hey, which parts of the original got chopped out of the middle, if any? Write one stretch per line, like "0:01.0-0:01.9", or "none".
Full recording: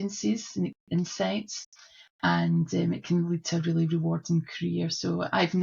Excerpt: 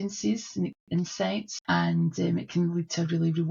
0:01.5-0:02.1